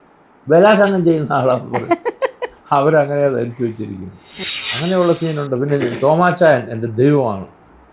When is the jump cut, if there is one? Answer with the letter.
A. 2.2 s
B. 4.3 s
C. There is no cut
B